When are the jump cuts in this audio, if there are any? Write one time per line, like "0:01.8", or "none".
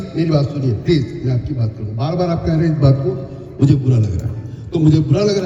none